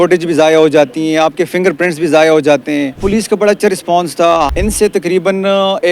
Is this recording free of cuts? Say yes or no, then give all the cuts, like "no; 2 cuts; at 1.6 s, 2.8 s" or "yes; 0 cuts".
no; 2 cuts; at 3.0 s, 4.5 s